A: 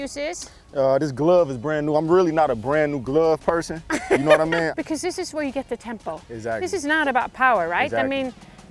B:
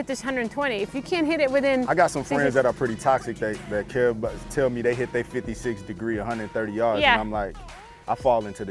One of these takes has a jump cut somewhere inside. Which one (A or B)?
A